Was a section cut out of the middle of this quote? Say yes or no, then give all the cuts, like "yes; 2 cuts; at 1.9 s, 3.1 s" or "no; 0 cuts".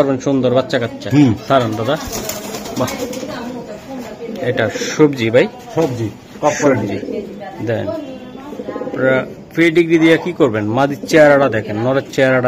no; 0 cuts